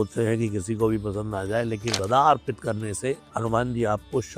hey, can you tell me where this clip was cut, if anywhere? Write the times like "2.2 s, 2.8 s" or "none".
2.0 s

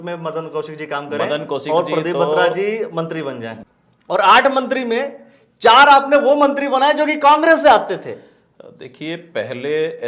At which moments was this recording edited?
3.5 s

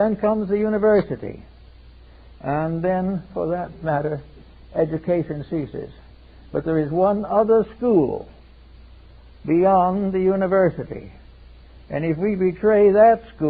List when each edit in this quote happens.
10.8 s

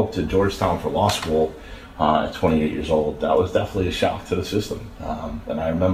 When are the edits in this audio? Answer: none

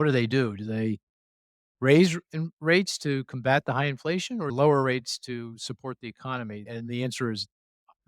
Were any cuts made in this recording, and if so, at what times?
4.5 s, 6.6 s

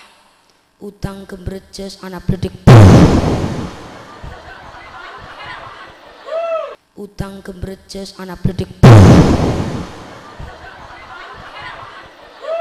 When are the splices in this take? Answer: 6.8 s

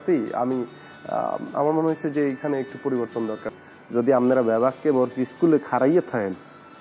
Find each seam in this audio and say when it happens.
3.6 s

